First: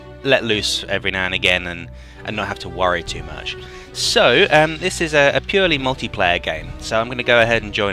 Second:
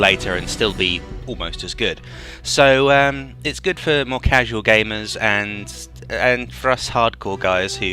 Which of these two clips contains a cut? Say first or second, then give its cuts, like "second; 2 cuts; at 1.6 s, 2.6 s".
first; 1 cut; at 1.3 s